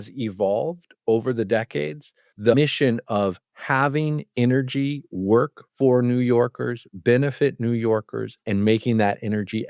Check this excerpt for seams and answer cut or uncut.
cut